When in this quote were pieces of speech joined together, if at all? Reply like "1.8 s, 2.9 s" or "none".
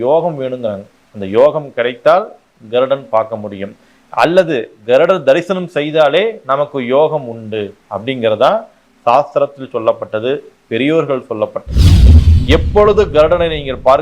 12.1 s